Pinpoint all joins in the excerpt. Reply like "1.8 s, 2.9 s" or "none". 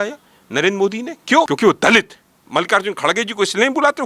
1.5 s, 2.4 s